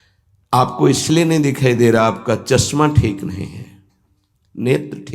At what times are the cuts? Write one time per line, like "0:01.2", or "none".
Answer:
none